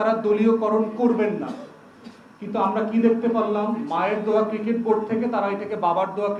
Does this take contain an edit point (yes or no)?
no